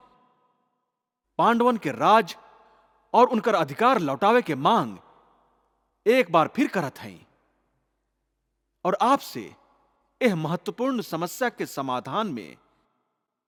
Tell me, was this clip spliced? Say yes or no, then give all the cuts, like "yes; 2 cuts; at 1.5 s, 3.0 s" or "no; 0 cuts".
no; 0 cuts